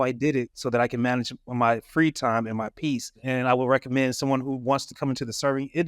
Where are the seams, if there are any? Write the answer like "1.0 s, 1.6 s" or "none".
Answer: 3.2 s